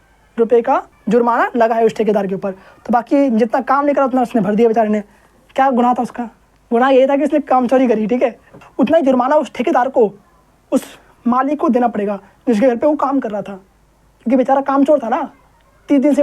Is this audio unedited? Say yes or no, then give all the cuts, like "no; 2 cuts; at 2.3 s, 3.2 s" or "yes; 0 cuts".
no; 2 cuts; at 0.9 s, 8.6 s